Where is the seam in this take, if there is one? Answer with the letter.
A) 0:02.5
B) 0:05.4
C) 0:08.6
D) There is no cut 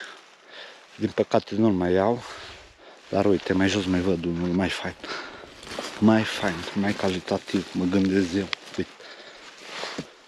D